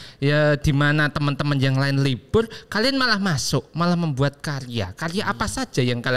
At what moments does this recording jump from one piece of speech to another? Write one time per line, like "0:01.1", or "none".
none